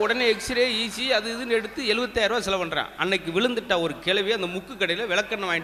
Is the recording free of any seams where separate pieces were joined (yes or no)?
yes